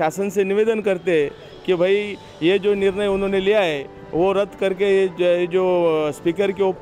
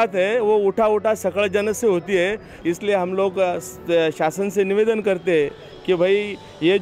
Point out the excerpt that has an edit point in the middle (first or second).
second